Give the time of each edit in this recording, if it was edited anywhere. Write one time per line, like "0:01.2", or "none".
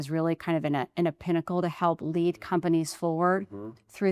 none